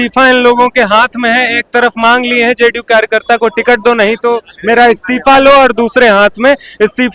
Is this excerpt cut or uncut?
uncut